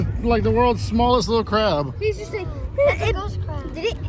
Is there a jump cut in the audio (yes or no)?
no